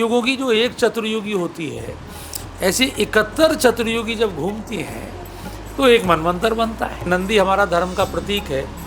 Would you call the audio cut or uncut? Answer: cut